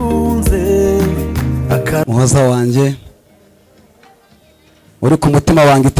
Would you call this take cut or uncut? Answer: cut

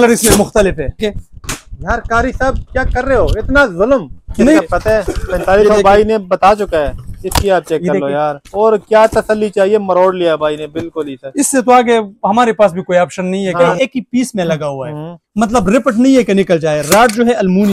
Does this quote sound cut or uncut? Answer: cut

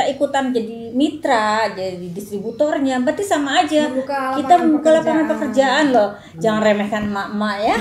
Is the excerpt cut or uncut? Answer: uncut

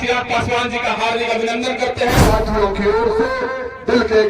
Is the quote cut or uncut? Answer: cut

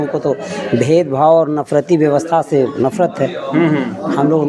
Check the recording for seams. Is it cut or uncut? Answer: uncut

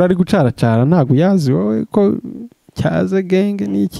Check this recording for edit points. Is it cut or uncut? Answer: uncut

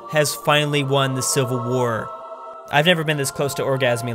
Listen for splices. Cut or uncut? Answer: cut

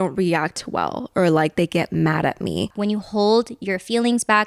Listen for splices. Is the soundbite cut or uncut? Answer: cut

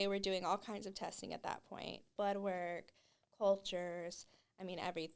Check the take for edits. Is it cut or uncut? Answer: cut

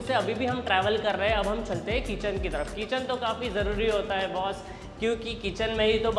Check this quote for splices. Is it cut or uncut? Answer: uncut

